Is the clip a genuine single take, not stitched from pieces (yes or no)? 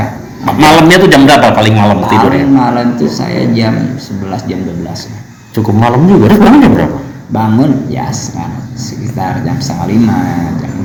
yes